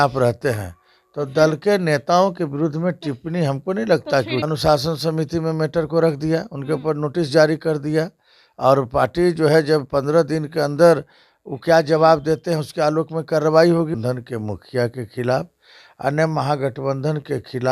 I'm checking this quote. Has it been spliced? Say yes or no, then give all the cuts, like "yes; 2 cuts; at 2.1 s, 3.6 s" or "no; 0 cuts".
yes; 2 cuts; at 4.4 s, 13.9 s